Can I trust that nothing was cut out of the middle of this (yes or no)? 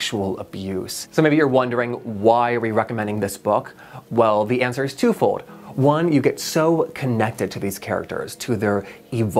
no